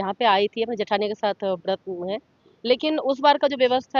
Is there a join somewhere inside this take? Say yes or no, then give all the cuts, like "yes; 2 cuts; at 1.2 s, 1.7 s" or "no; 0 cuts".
no; 0 cuts